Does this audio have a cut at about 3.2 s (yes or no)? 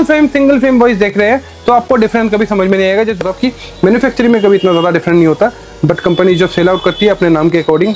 yes